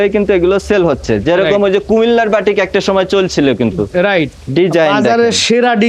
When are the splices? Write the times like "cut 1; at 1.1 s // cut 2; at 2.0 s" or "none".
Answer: cut 1; at 4.4 s